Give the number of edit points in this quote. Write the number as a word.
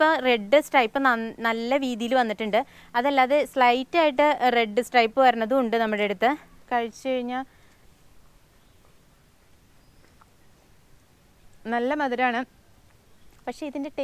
one